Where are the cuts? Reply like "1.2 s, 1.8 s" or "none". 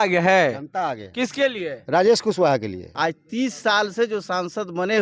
2.8 s